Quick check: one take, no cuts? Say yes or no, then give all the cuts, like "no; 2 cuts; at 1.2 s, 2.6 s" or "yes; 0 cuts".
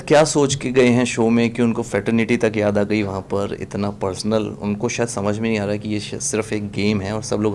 yes; 0 cuts